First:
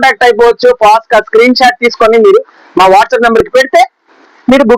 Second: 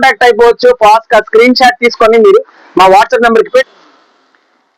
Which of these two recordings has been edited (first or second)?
second